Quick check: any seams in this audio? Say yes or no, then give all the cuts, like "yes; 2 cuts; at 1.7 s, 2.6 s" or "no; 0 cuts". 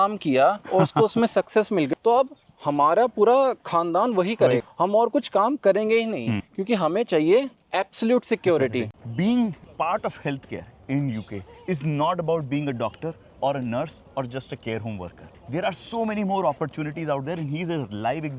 yes; 1 cut; at 9.0 s